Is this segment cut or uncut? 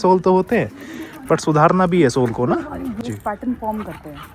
cut